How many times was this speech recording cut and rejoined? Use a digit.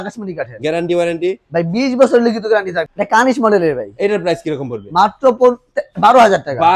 1